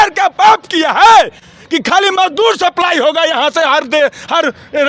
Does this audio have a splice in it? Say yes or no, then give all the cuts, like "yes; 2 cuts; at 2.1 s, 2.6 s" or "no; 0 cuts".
no; 0 cuts